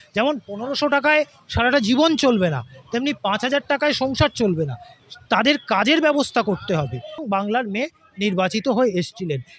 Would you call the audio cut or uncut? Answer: cut